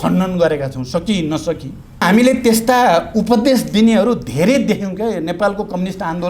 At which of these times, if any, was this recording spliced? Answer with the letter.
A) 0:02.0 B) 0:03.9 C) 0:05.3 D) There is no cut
A